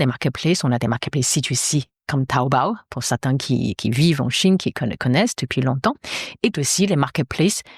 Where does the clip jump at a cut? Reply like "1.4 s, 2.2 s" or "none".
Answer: none